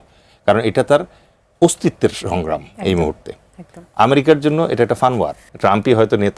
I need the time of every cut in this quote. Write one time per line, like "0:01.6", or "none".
0:05.4